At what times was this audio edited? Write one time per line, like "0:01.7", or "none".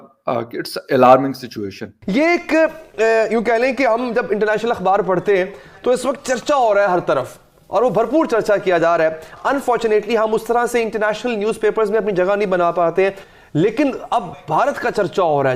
0:01.9
0:13.2